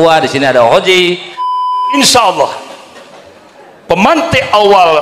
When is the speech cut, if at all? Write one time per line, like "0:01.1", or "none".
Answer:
0:01.5